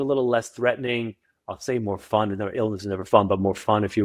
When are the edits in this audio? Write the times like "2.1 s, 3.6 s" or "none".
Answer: none